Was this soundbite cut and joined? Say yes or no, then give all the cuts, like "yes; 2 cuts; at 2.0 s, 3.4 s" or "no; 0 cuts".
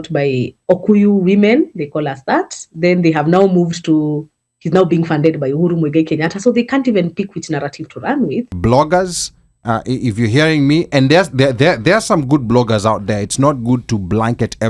yes; 1 cut; at 8.5 s